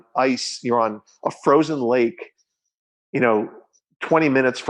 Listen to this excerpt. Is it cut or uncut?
uncut